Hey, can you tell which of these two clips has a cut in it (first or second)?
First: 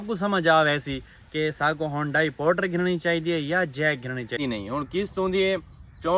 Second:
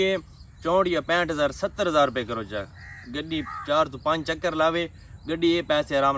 first